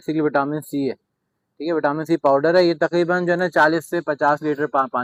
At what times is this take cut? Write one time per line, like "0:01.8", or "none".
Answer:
none